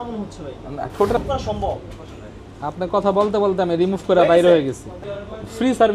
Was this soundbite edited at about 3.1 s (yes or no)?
no